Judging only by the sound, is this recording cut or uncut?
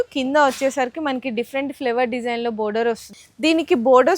cut